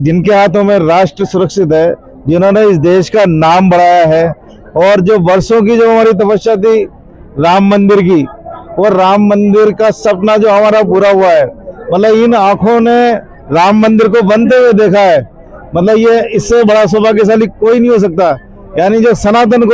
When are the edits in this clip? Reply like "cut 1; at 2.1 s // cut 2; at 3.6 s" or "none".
none